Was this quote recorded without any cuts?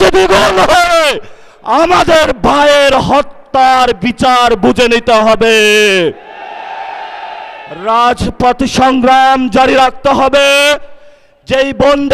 yes; 0 cuts

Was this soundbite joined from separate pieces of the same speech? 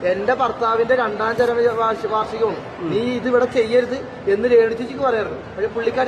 no; 0 cuts

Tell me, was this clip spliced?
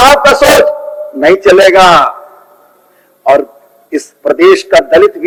no; 0 cuts

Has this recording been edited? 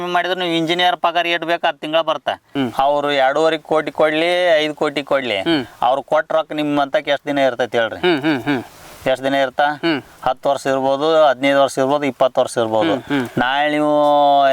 yes; 1 cut; at 2.5 s

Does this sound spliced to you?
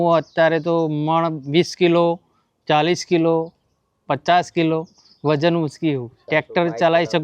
no; 0 cuts

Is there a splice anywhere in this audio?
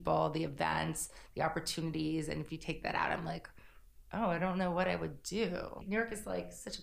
yes; 1 cut; at 5.8 s

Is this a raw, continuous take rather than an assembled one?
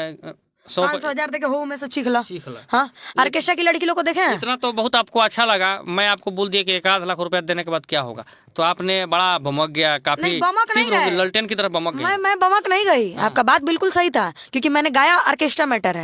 yes; 0 cuts

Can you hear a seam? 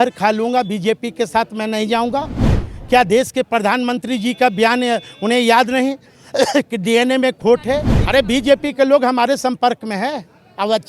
yes; 1 cut; at 7.9 s

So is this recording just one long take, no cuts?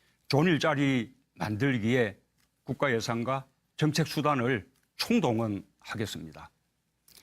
no; 1 cut; at 4.1 s

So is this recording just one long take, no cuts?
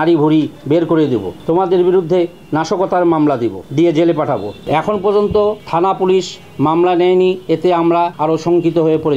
no; 6 cuts; at 1.3 s, 3.6 s, 4.6 s, 5.6 s, 7.4 s, 8.1 s

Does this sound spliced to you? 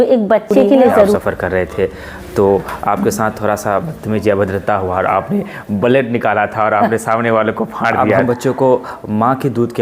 yes; 2 cuts; at 1.1 s, 8.2 s

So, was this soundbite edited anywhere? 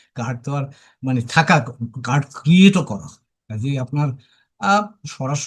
no; 0 cuts

